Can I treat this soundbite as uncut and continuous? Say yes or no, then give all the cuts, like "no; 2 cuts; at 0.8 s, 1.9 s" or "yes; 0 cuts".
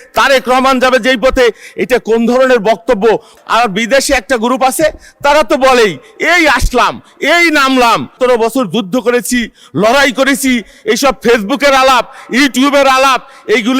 no; 2 cuts; at 3.3 s, 8.1 s